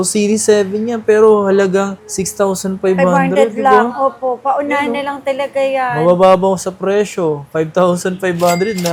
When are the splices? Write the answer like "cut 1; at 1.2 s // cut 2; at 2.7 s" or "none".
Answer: none